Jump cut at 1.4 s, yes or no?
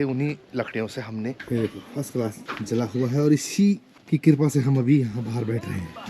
yes